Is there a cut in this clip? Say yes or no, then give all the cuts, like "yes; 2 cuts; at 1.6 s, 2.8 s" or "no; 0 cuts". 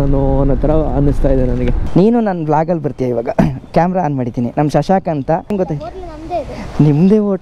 yes; 2 cuts; at 1.8 s, 5.5 s